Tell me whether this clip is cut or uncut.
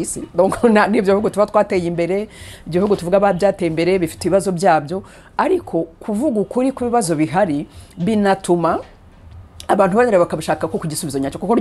uncut